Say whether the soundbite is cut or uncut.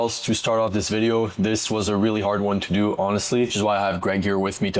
uncut